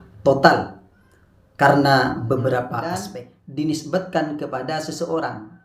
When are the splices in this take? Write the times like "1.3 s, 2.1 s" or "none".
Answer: 3.0 s